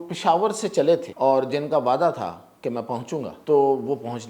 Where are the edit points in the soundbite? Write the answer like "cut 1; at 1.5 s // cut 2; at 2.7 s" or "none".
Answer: cut 1; at 1.1 s // cut 2; at 3.3 s

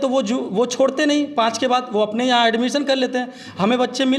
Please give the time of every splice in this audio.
none

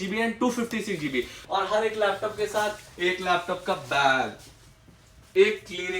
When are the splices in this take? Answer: cut 1; at 1.4 s

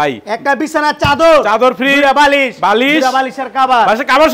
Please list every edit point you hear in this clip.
none

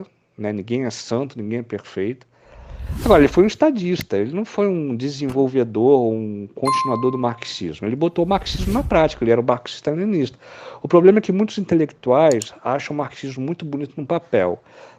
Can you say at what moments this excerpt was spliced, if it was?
none

